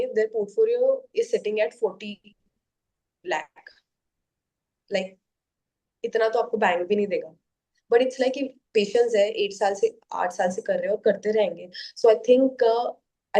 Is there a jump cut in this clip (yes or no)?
no